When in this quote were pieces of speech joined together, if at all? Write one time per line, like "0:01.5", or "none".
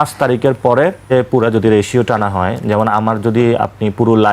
0:01.1